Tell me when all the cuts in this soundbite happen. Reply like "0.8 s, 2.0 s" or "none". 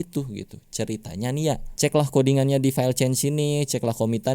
1.7 s

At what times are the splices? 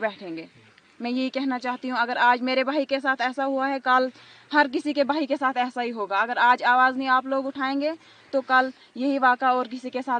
none

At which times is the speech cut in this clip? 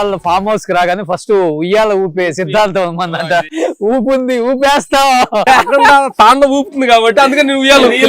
3.4 s, 5.4 s

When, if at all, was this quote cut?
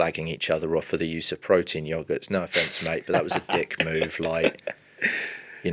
none

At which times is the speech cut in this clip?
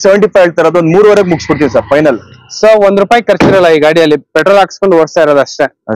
2.3 s

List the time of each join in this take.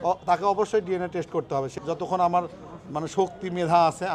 1.8 s

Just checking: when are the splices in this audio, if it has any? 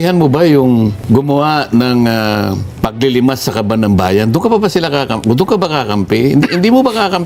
1.0 s, 2.7 s

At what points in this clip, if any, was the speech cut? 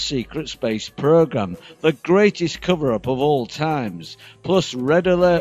4.2 s

